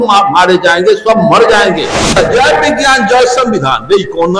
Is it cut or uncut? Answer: cut